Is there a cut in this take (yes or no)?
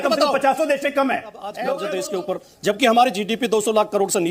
yes